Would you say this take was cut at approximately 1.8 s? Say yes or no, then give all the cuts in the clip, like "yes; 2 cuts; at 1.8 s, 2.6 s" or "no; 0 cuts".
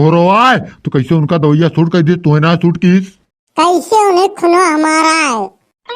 no; 1 cut; at 3.4 s